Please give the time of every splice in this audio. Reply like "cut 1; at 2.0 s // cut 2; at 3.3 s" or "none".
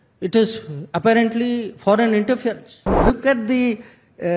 cut 1; at 3.0 s